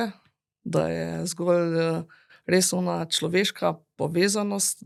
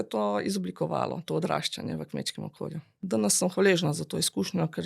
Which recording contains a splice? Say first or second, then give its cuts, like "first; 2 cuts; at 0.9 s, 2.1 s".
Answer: second; 1 cut; at 3.0 s